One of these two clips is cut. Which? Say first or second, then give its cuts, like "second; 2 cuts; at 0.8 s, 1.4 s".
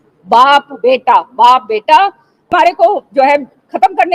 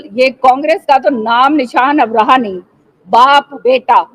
first; 1 cut; at 2.5 s